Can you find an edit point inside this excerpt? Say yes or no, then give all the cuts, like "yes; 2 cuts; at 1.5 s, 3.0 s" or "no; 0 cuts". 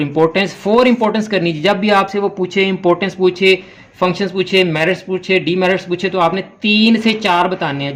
no; 0 cuts